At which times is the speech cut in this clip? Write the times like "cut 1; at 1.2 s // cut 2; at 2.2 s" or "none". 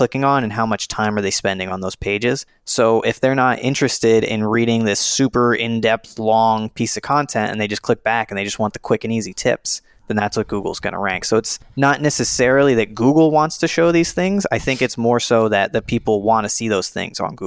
cut 1; at 2.6 s // cut 2; at 11.6 s